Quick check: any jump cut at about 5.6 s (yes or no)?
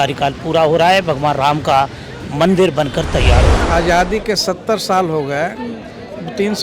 no